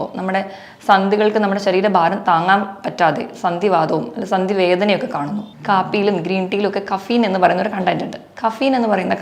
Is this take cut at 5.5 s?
yes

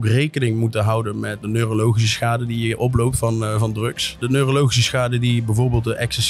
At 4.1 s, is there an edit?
yes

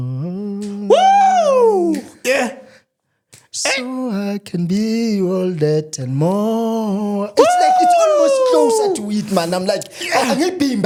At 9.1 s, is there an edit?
no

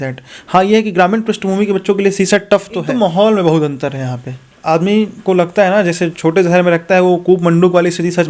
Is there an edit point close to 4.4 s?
no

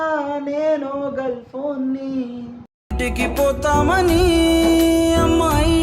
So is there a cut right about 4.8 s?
no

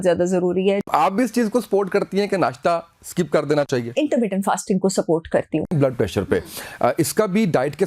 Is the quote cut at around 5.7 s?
yes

